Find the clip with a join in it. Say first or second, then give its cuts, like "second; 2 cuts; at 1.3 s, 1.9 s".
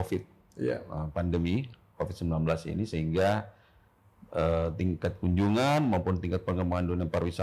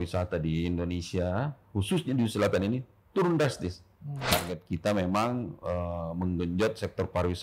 second; 1 cut; at 4.2 s